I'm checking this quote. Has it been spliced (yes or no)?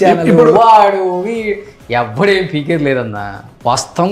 no